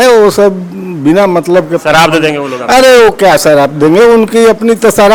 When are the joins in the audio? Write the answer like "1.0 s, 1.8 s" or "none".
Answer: none